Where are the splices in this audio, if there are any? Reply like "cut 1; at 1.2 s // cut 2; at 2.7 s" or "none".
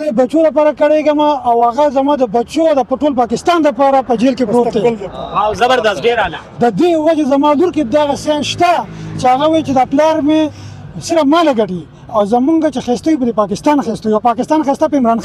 none